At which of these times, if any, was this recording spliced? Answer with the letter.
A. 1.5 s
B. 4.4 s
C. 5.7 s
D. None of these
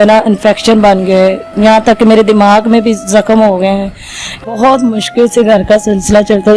B